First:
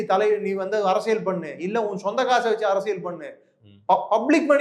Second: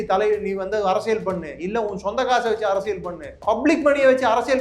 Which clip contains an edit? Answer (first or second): second